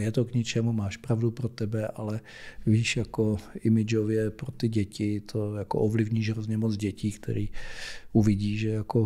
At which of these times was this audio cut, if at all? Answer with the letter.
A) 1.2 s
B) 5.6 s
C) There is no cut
C